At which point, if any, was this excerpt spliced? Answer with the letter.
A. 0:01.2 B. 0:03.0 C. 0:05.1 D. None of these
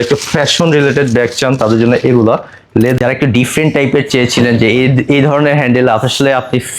B